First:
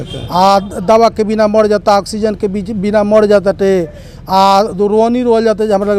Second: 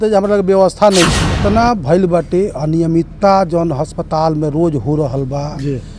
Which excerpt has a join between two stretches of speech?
second; 1 cut; at 1.4 s

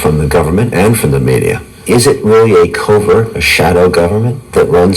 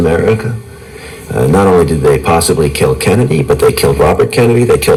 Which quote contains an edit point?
first; 1 cut; at 1.7 s

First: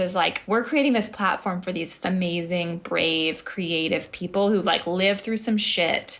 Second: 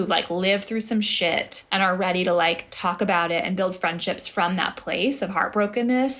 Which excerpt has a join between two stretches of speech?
first; 1 cut; at 2.0 s

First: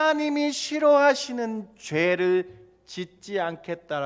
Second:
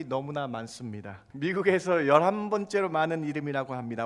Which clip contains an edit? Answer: second; 1 cut; at 1.2 s

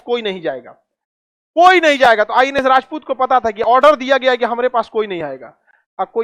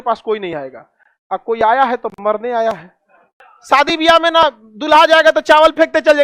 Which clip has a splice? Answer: second; 1 cut; at 3.3 s

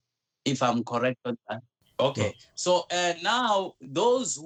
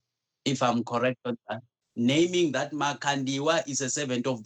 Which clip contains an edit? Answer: second; 1 cut; at 1.8 s

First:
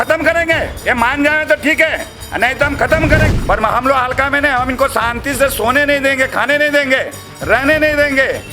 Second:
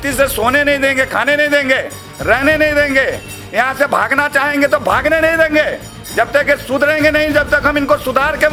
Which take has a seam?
first; 1 cut; at 3.3 s

